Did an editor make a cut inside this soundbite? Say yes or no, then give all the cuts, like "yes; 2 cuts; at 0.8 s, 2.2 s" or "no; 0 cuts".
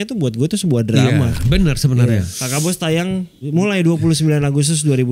yes; 2 cuts; at 2.4 s, 3.5 s